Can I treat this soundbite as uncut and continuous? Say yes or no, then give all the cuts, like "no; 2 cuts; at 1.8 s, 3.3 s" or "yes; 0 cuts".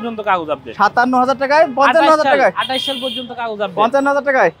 yes; 0 cuts